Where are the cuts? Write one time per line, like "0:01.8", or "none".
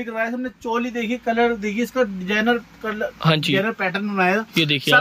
none